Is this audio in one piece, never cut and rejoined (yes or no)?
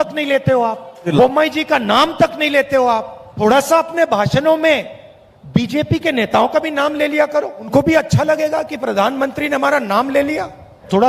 yes